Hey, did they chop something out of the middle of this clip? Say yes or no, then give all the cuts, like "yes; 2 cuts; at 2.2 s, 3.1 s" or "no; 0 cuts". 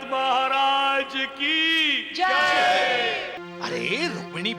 yes; 1 cut; at 3.3 s